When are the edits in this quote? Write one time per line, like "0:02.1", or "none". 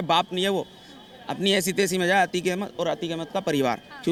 none